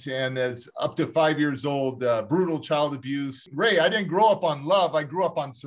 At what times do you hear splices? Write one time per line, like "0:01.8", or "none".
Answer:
0:03.4

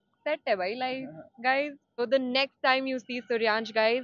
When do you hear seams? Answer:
0:02.0

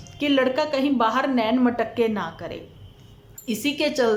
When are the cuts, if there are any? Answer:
none

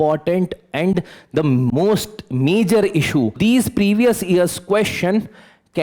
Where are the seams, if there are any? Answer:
0:03.4

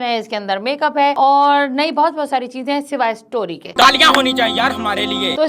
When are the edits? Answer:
none

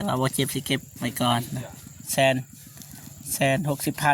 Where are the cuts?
none

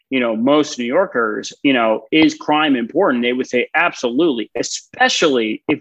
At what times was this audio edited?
none

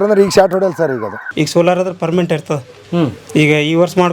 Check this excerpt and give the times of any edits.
0:01.3

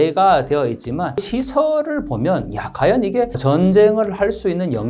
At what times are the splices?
0:01.3
0:03.4

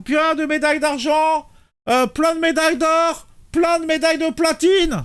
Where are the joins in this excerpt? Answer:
none

